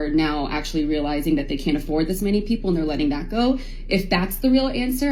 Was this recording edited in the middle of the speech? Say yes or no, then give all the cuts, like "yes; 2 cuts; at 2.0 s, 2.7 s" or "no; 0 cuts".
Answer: no; 0 cuts